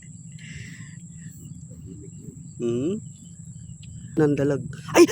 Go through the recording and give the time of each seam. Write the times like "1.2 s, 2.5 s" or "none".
4.2 s